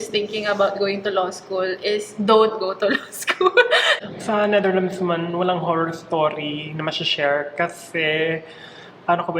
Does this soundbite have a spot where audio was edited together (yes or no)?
yes